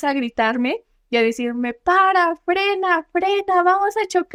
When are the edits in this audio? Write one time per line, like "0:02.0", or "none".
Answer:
none